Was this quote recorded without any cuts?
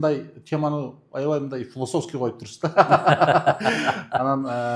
yes; 0 cuts

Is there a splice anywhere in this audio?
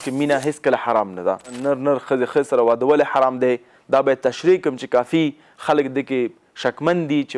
yes; 1 cut; at 1.6 s

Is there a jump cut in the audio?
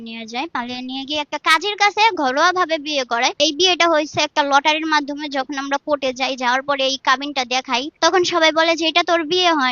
yes; 2 cuts; at 3.4 s, 7.9 s

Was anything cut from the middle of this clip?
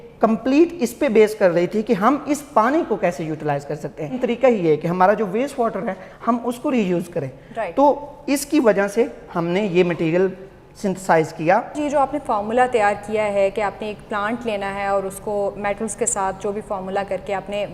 yes; 2 cuts; at 4.1 s, 11.8 s

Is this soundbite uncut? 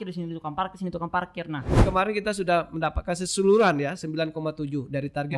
no; 1 cut; at 1.8 s

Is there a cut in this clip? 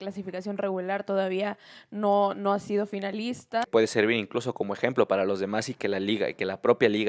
yes; 1 cut; at 3.7 s

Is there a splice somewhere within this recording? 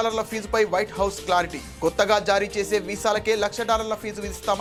no; 0 cuts

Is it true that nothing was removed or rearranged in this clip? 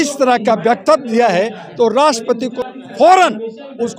no; 1 cut; at 2.6 s

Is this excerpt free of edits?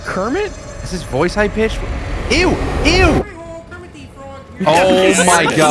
no; 1 cut; at 4.6 s

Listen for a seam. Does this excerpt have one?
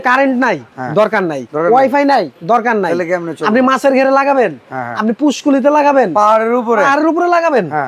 yes; 2 cuts; at 1.0 s, 2.3 s

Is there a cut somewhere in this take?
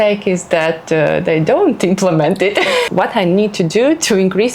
yes; 1 cut; at 2.9 s

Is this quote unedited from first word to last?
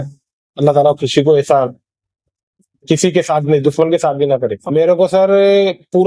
no; 1 cut; at 4.6 s

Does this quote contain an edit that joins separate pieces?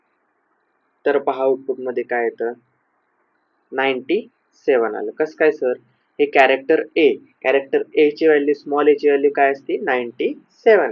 no; 0 cuts

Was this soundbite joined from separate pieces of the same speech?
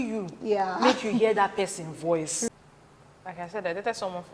yes; 1 cut; at 2.5 s

